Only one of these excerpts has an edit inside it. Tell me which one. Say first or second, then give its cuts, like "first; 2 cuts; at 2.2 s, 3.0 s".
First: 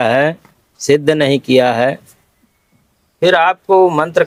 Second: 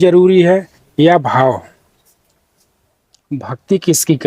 second; 1 cut; at 3.4 s